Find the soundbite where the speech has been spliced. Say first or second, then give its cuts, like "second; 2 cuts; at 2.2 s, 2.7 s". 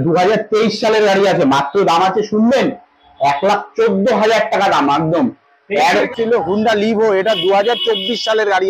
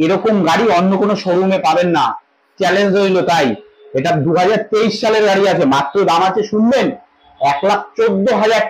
first; 1 cut; at 6.1 s